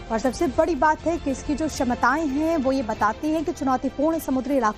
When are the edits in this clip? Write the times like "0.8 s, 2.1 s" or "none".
none